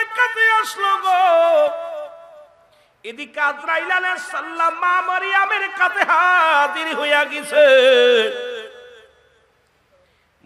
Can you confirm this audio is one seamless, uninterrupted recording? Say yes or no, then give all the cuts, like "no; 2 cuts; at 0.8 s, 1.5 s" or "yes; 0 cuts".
yes; 0 cuts